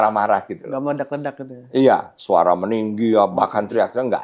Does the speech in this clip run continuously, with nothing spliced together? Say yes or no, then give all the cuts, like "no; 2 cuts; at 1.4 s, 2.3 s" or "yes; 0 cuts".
no; 1 cut; at 2.1 s